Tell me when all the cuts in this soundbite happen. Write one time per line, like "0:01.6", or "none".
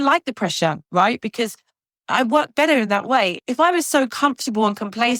none